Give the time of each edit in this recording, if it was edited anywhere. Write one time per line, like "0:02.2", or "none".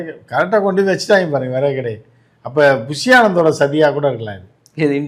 none